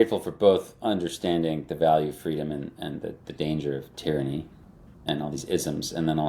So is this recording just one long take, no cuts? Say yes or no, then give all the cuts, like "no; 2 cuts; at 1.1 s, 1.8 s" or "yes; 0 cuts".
yes; 0 cuts